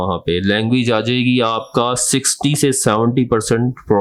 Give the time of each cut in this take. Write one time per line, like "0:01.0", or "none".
none